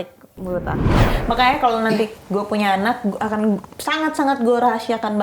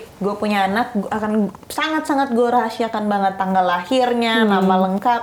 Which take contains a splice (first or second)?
first